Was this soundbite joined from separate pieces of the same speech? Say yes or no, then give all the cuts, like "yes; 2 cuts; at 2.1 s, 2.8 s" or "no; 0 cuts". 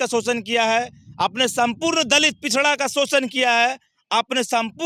no; 0 cuts